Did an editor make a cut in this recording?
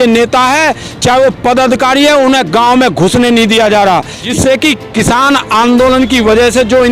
yes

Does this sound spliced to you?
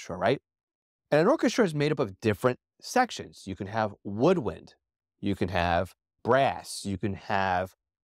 yes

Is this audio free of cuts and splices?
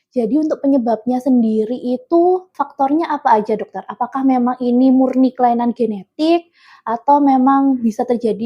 no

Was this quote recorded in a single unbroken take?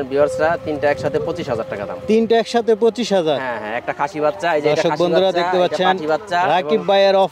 yes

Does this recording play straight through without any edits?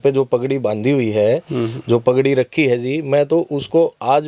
yes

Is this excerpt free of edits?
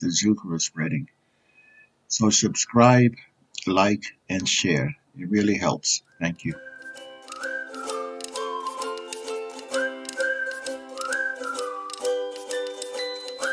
no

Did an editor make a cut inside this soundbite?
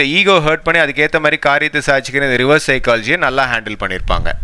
no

